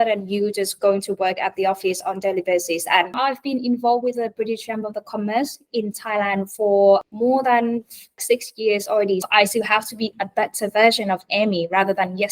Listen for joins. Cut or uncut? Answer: cut